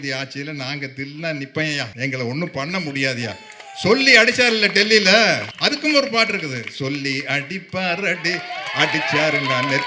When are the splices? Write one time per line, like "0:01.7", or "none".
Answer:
0:01.9
0:05.5

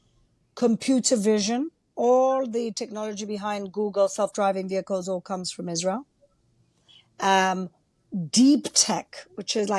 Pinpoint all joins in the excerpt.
none

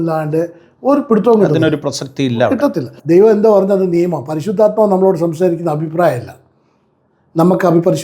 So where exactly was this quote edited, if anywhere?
0:02.9

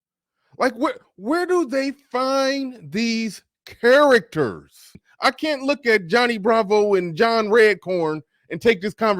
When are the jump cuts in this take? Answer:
0:05.0

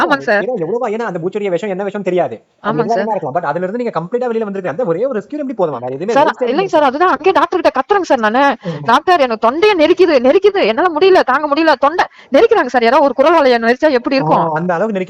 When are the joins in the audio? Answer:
none

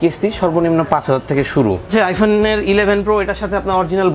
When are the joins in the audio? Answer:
0:01.9

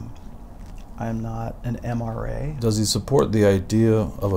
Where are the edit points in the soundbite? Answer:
0:02.6

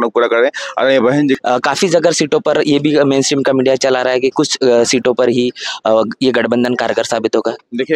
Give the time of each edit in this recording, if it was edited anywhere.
0:01.4

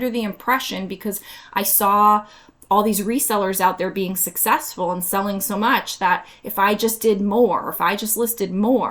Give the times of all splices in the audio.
none

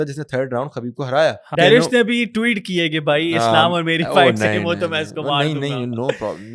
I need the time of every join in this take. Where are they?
0:01.5

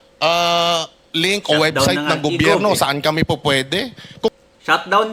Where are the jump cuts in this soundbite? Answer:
none

